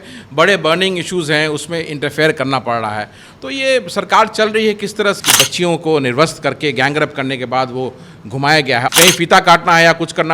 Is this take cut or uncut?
cut